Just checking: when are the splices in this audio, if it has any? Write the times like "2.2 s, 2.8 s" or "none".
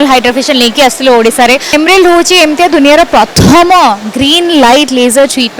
1.7 s